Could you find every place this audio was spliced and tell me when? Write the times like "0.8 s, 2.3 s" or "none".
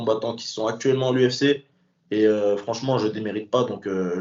none